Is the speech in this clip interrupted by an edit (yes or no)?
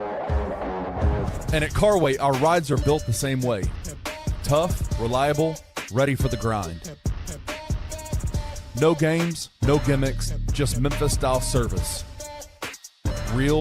yes